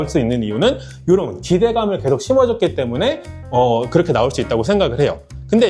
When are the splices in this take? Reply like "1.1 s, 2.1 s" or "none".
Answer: none